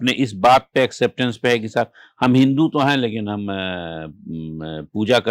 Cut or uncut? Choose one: uncut